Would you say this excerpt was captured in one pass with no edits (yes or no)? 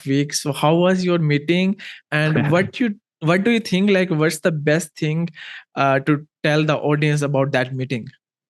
yes